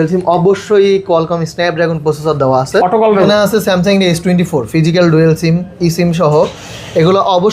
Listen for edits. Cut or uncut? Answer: cut